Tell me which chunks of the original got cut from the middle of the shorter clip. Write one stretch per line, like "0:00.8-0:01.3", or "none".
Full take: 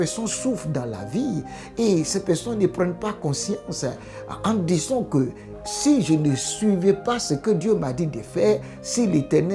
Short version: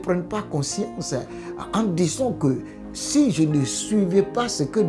none